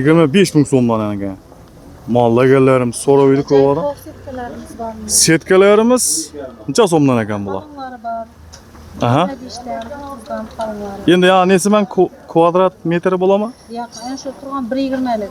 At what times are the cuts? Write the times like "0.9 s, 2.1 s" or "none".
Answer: none